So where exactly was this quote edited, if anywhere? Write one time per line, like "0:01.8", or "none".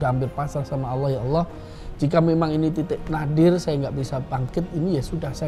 none